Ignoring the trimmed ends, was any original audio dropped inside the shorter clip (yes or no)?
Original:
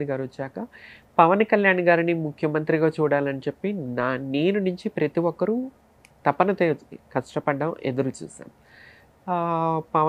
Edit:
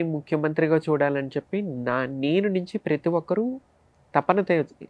no